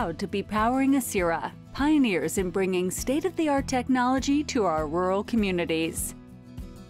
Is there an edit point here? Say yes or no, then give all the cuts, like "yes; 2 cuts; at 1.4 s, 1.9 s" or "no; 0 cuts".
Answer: yes; 1 cut; at 6.0 s